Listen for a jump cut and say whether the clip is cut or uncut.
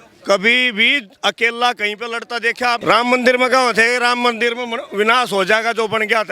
cut